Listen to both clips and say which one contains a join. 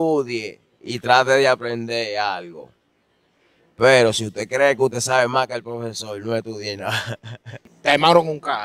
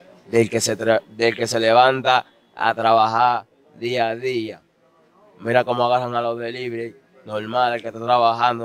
first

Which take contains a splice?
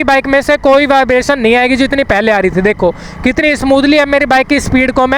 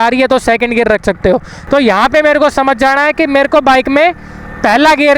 second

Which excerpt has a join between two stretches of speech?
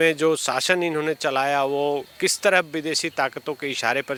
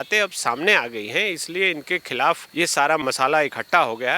second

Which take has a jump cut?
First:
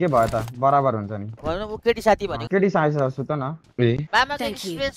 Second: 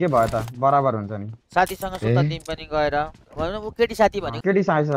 first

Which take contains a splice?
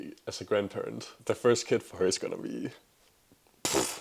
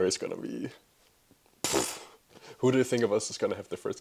first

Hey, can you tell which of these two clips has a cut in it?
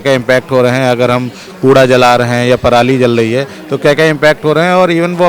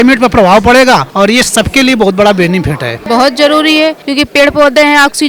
second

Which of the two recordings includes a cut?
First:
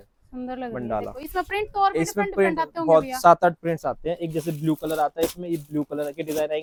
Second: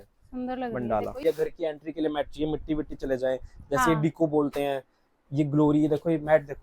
second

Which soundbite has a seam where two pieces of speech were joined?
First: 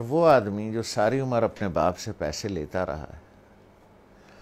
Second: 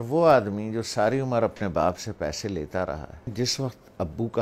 second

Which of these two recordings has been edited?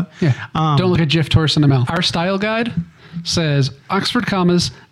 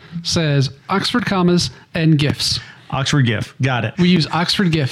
first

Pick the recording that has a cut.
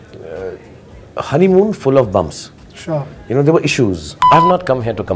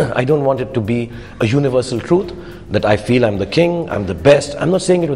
first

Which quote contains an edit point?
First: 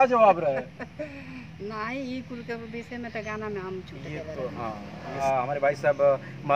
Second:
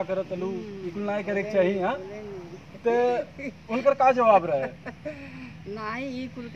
first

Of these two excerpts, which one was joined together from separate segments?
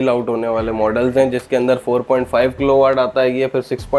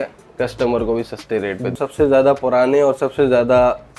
second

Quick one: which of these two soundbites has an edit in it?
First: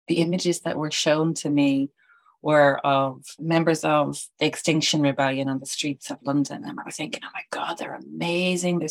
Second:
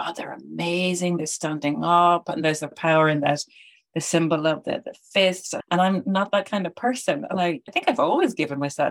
second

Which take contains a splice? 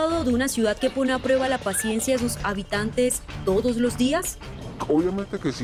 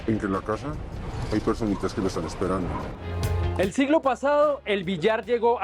second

